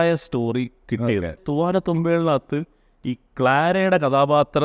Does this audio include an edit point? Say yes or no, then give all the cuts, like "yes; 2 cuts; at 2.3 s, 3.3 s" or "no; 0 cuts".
yes; 1 cut; at 1.4 s